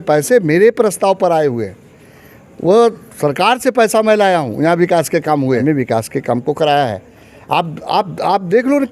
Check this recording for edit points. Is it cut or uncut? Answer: cut